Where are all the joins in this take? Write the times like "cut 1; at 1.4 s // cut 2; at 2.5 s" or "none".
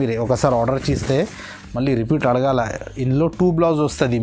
none